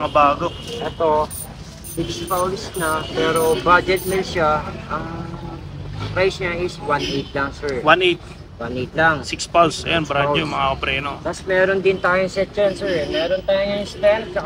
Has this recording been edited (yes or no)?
no